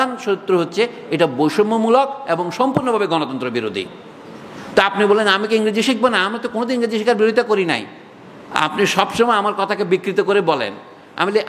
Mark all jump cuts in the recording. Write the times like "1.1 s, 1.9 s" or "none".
none